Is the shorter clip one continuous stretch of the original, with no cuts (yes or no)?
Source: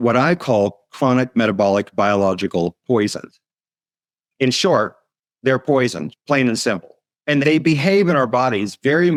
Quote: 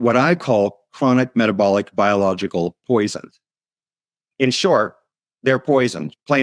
yes